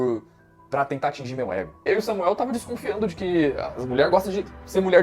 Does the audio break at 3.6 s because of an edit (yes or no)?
no